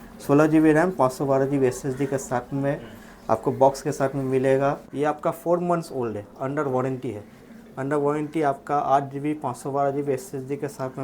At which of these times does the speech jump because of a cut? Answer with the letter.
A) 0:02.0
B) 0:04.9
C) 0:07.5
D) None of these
B